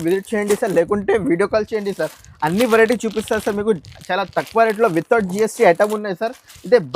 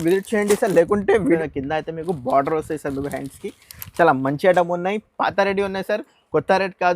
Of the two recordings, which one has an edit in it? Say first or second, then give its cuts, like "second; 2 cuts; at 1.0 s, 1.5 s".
second; 1 cut; at 1.4 s